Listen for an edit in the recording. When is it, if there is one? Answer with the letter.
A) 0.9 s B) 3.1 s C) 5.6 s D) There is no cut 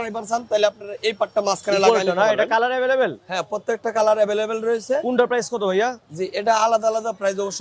D